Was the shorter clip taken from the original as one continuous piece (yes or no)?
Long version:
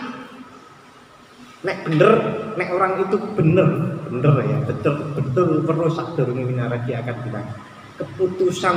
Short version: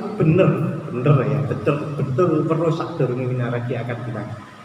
yes